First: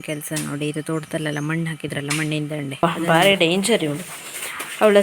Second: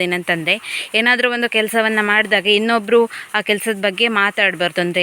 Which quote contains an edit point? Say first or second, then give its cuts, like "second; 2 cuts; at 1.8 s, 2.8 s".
first; 1 cut; at 2.8 s